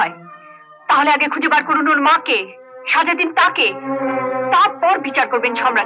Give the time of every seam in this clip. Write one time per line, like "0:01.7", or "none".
none